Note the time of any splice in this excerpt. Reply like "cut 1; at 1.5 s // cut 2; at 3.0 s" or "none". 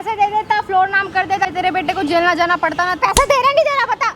cut 1; at 1.5 s // cut 2; at 3.0 s